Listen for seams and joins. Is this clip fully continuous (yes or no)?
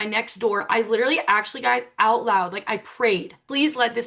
yes